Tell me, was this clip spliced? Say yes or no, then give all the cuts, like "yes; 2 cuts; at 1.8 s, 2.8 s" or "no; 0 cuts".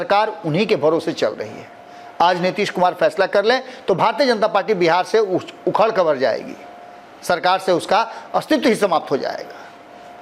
no; 0 cuts